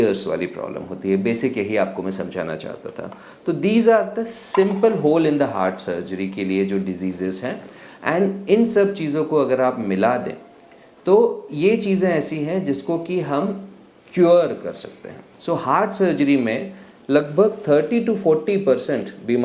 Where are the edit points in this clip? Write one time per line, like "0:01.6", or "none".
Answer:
none